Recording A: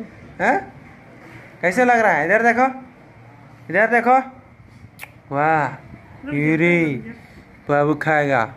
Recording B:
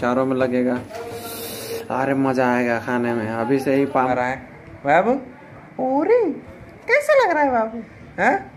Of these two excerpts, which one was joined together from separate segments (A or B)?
B